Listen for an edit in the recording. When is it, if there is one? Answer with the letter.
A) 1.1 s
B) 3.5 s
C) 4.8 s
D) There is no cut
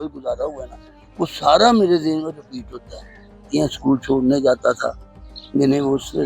B